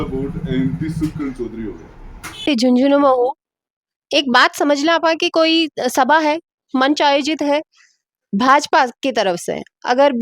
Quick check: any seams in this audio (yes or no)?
yes